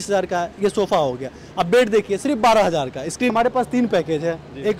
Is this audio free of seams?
no; 1 cut; at 3.3 s

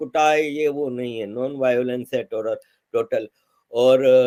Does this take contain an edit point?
no; 0 cuts

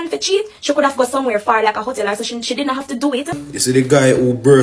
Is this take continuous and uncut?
no; 1 cut; at 3.4 s

